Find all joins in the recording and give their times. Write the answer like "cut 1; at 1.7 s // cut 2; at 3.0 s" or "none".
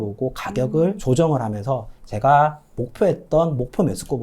cut 1; at 1.0 s